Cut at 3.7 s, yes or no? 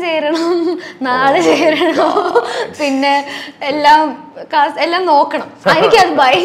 no